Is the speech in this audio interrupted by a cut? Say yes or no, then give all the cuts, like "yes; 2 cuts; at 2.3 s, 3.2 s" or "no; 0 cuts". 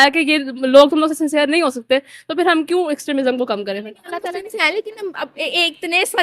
yes; 1 cut; at 4.2 s